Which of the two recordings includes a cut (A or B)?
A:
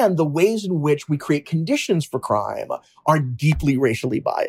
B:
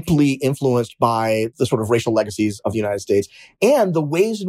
B